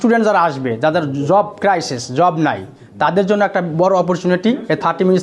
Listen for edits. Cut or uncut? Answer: uncut